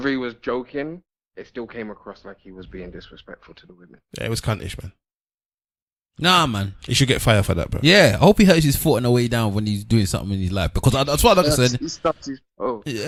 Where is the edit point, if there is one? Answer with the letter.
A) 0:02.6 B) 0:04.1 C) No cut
C